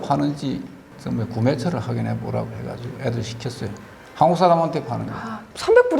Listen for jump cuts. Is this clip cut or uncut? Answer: uncut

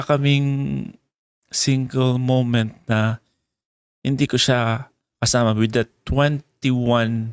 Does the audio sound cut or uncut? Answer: uncut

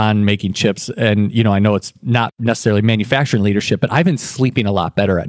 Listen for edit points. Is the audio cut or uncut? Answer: uncut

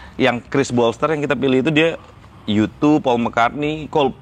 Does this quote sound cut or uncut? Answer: uncut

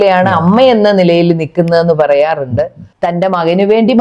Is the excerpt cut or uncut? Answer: cut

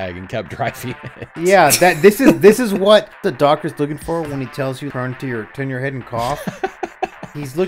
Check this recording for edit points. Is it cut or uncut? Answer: cut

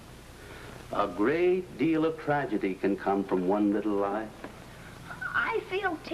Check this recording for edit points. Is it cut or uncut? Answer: cut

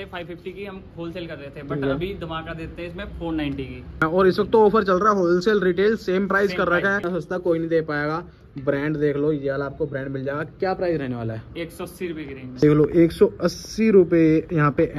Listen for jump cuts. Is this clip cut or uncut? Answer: cut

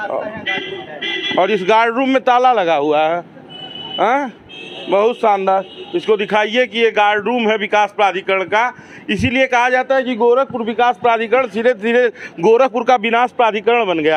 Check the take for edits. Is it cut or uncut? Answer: uncut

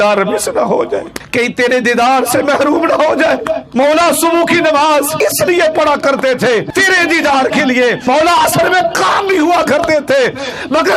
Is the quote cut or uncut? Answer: cut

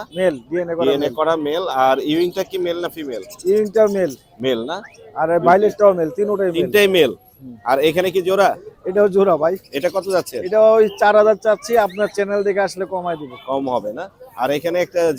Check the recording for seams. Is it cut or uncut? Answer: uncut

